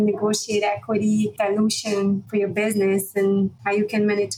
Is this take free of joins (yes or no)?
no